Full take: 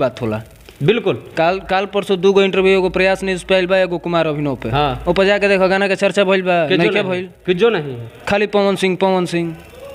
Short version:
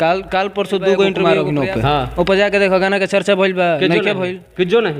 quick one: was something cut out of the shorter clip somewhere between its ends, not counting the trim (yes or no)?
yes